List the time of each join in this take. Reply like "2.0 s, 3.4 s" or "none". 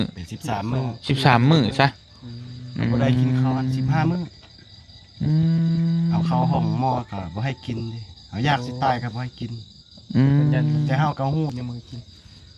11.5 s